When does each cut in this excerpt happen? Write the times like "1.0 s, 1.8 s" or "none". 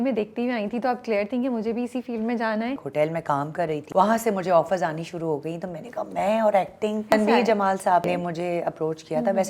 2.8 s, 3.8 s, 7.1 s, 8.1 s